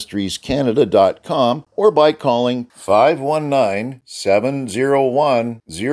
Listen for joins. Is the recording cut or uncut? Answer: cut